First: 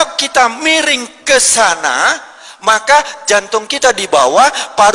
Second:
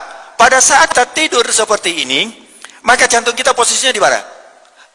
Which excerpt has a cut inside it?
second; 1 cut; at 0.9 s

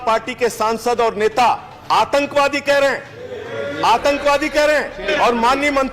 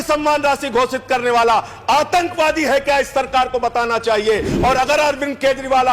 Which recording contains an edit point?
first; 2 cuts; at 1.7 s, 5.1 s

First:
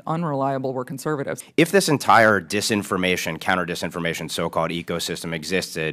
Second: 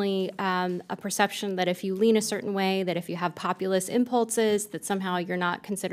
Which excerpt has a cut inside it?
first; 1 cut; at 1.4 s

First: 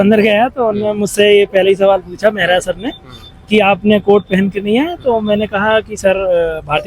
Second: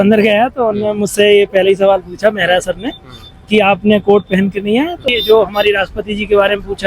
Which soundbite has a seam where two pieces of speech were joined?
second; 1 cut; at 5.0 s

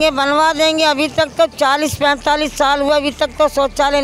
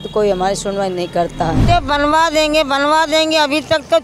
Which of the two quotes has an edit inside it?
second; 1 cut; at 1.6 s

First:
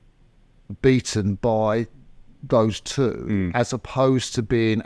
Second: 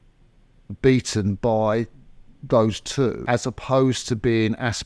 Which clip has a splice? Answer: second; 1 cut; at 3.2 s

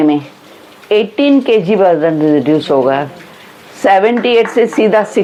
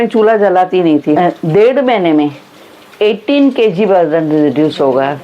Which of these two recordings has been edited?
second; 1 cut; at 1.2 s

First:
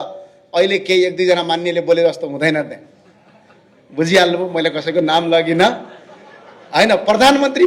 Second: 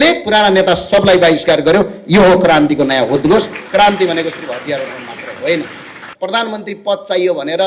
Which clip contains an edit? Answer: second; 1 cut; at 6.0 s

